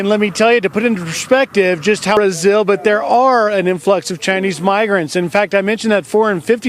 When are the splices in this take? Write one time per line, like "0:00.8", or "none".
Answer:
0:02.2

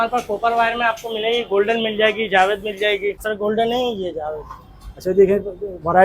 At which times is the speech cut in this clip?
0:03.2

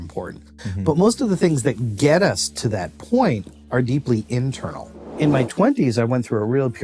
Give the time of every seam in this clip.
0:05.1

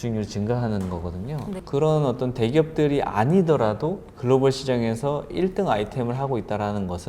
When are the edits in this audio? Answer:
0:01.7
0:04.1

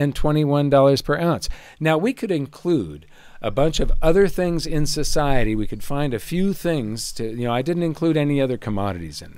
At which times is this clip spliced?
none

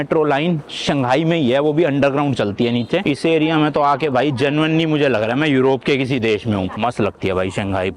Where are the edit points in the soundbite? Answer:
0:03.0
0:06.8

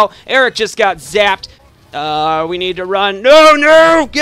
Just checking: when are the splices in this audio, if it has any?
0:01.6

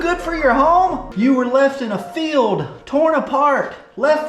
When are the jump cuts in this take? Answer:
0:01.0

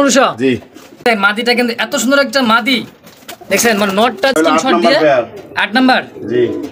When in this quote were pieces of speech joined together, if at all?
0:01.1
0:04.4

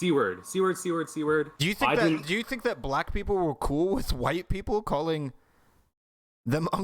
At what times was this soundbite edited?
0:01.5

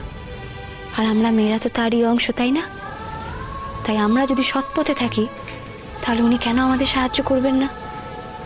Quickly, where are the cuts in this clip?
none

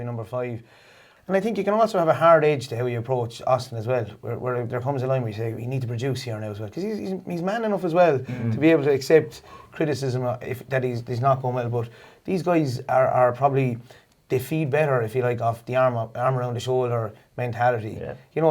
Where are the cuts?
0:01.1

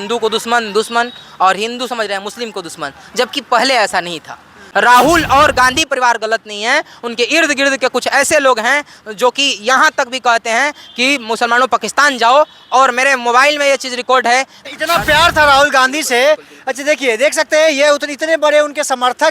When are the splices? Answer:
0:04.6
0:14.6

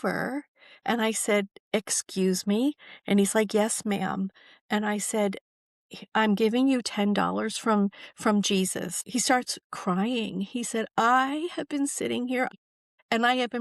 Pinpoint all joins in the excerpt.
0:09.0
0:12.5

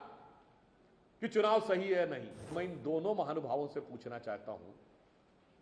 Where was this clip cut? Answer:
0:02.5

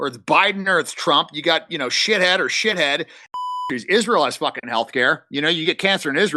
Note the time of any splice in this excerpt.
0:03.7

